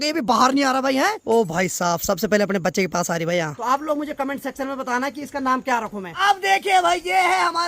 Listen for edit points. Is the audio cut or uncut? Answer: cut